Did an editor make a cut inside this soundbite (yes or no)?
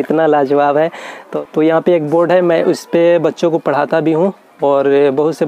yes